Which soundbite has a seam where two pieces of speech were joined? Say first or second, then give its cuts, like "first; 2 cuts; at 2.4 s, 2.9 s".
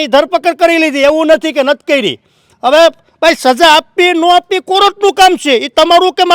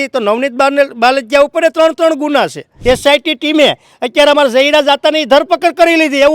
second; 1 cut; at 2.7 s